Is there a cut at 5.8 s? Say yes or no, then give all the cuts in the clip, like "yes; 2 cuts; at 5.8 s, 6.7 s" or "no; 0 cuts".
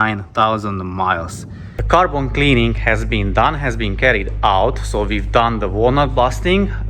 no; 1 cut; at 1.7 s